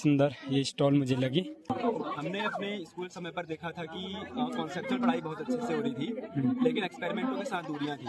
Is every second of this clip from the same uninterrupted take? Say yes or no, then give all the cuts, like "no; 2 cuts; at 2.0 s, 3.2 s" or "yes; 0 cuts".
no; 1 cut; at 1.7 s